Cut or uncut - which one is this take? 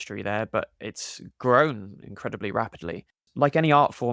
cut